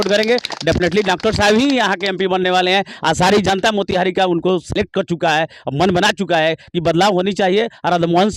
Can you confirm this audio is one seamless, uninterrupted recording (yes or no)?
yes